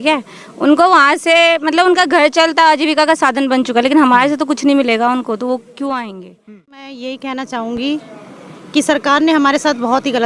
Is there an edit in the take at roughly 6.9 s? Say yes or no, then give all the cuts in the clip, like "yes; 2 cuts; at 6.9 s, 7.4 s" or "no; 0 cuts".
yes; 1 cut; at 6.9 s